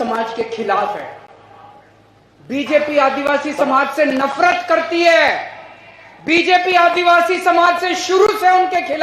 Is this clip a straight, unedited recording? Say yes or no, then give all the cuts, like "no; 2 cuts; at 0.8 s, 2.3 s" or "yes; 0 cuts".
yes; 0 cuts